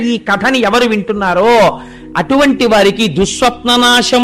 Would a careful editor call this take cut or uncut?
uncut